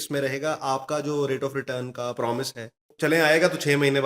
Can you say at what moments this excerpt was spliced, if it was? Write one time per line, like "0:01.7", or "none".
0:02.9